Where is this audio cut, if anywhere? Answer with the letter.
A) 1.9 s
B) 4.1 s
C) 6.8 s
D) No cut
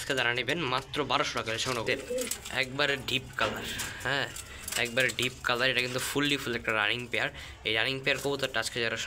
A